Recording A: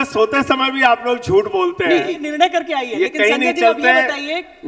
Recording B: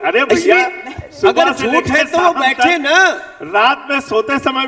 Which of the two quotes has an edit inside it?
A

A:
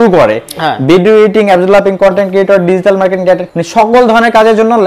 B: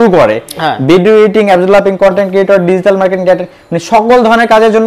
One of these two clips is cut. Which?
A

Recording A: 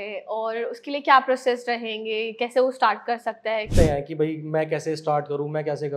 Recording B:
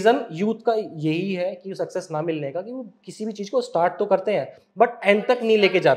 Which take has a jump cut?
A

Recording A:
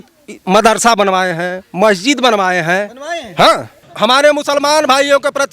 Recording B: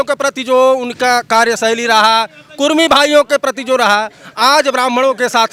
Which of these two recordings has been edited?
A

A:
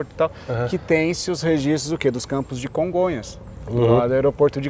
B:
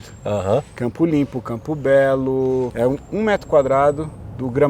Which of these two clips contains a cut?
B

